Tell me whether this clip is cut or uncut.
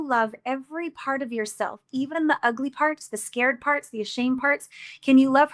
uncut